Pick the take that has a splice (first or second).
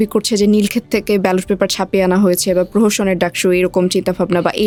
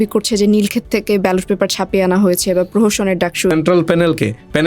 second